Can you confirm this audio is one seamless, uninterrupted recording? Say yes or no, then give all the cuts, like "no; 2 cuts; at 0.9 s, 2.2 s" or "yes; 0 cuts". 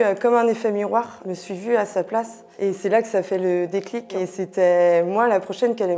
no; 2 cuts; at 1.2 s, 4.0 s